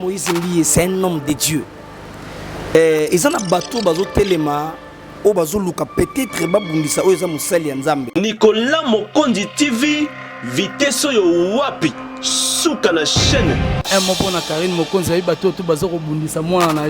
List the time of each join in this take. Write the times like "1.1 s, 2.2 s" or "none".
8.1 s, 13.8 s